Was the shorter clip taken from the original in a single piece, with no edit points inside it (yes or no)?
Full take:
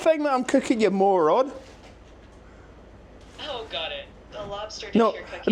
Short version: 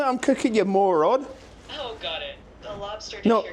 no